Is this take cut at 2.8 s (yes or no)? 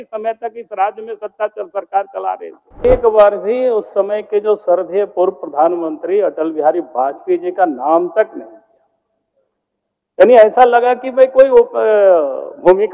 yes